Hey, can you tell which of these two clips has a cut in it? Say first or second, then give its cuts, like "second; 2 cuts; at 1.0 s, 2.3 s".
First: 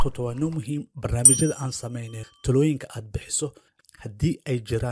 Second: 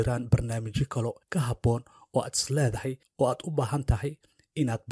second; 2 cuts; at 1.2 s, 3.0 s